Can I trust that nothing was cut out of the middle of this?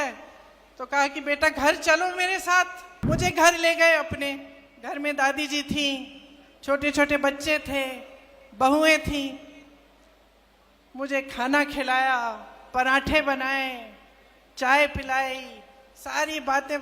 no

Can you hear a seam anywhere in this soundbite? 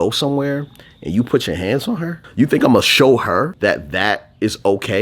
yes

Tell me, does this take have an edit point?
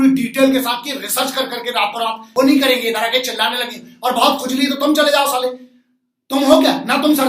yes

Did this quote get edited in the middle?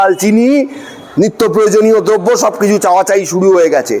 no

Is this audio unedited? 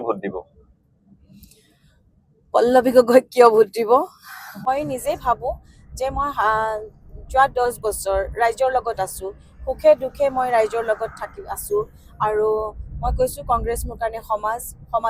yes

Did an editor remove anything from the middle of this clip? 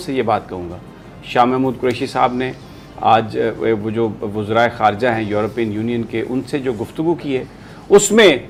no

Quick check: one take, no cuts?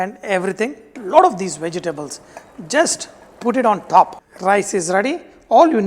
no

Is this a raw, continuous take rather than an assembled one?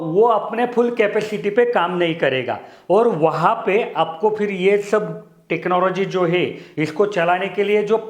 yes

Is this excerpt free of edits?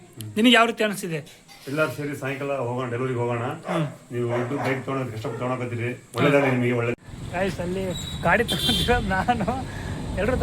no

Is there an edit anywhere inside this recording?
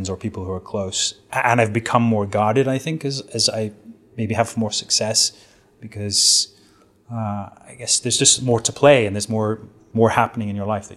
no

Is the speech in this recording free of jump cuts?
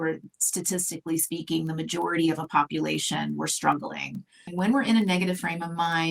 no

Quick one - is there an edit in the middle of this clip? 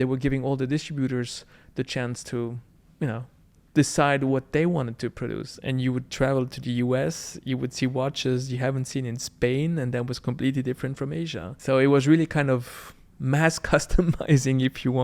yes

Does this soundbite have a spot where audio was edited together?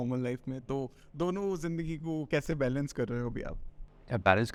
no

